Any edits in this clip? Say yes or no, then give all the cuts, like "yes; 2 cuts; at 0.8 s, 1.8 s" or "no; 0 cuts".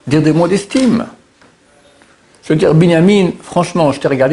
no; 0 cuts